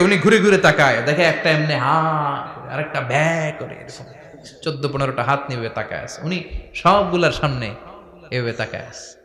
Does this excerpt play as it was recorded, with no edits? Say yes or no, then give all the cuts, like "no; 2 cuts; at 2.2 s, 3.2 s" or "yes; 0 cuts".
yes; 0 cuts